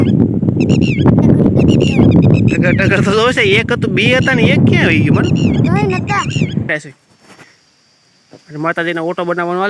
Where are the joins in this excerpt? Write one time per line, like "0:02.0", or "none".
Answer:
0:06.7